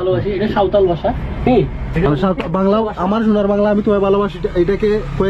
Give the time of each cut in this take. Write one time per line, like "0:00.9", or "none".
none